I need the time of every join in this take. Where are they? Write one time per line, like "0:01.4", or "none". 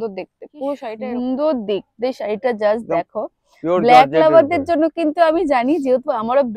0:01.0